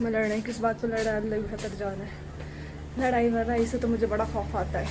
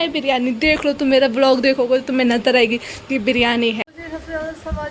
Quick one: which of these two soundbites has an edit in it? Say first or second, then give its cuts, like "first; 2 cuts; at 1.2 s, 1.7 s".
second; 1 cut; at 3.9 s